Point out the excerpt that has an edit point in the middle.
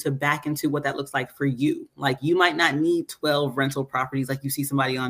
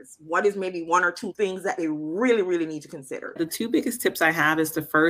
second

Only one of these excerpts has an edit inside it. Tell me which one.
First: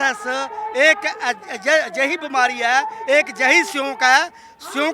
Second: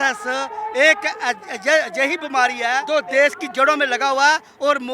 second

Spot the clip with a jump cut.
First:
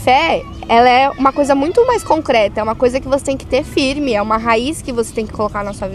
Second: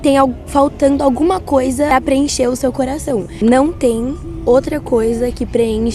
second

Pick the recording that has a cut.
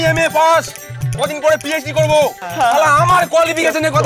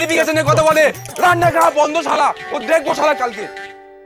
first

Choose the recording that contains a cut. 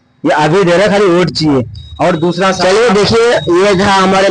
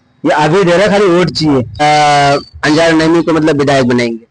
second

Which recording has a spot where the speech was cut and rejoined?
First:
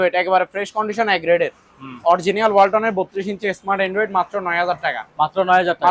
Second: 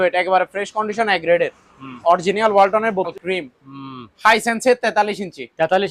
second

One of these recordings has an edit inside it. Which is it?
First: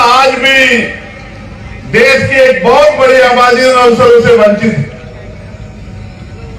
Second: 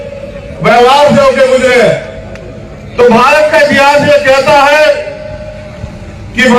first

